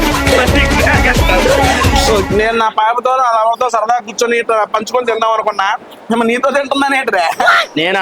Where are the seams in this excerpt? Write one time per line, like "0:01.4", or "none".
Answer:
0:02.2